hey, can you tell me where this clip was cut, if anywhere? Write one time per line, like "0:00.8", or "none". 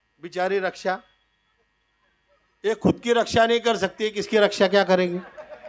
none

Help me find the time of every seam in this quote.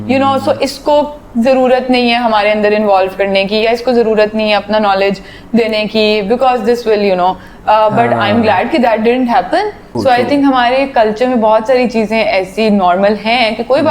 0:10.0

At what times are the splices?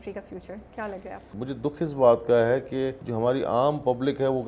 0:01.3
0:03.0

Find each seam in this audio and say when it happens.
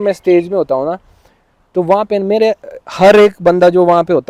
none

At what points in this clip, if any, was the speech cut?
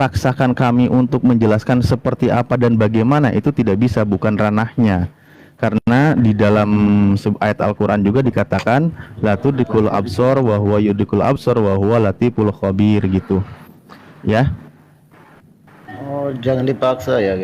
none

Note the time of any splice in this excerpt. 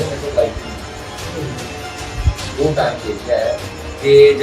none

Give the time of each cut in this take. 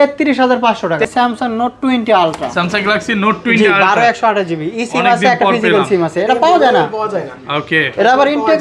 0:01.0

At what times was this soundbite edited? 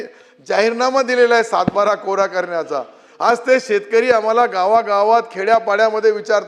none

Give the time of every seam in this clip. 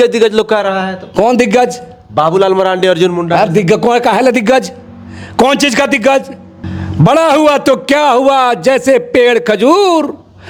none

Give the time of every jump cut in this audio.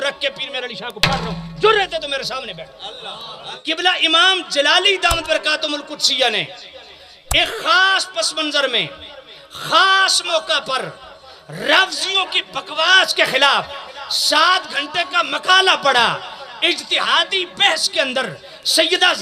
0:03.4

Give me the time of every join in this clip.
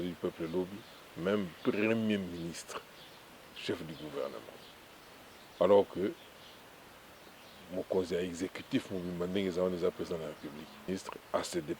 0:10.9

